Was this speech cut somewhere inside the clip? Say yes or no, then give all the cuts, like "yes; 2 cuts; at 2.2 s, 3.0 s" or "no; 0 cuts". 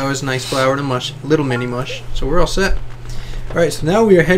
no; 0 cuts